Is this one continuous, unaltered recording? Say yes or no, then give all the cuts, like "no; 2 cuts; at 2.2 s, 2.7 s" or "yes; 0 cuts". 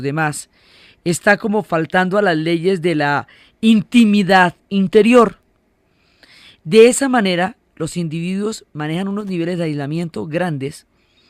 no; 1 cut; at 1.2 s